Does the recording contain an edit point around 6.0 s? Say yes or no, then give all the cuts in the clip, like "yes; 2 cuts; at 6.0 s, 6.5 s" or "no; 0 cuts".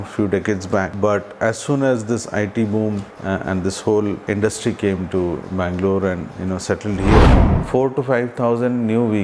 no; 4 cuts; at 0.9 s, 3.1 s, 4.2 s, 7.5 s